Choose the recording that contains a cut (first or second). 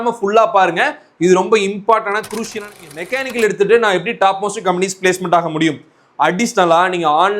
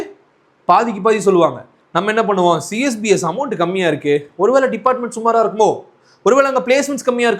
first